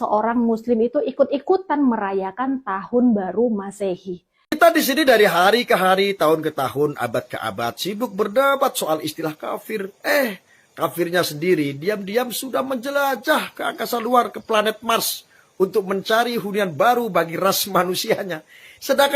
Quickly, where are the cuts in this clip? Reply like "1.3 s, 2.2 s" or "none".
4.6 s